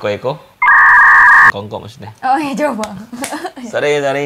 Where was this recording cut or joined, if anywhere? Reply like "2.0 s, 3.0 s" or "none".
none